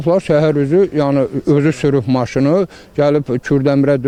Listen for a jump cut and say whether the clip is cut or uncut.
uncut